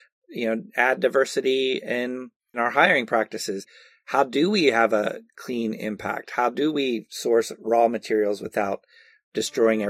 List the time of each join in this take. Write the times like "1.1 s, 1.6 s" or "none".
2.6 s, 5.3 s